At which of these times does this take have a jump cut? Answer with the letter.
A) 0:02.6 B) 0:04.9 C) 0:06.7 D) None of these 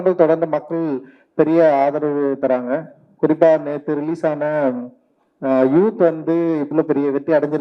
C